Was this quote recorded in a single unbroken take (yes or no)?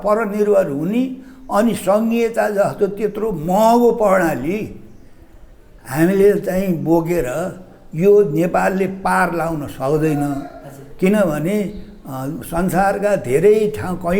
yes